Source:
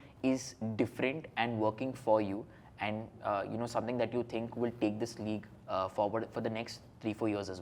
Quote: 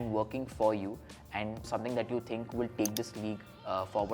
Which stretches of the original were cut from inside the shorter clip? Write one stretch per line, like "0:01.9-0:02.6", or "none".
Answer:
0:03.1-0:03.7